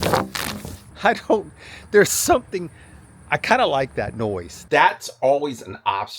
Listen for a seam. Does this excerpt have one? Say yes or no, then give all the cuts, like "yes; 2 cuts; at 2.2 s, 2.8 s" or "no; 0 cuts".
yes; 1 cut; at 4.5 s